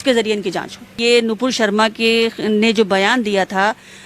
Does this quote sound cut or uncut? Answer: cut